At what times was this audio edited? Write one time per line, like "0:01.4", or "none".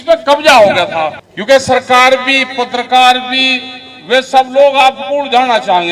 0:01.3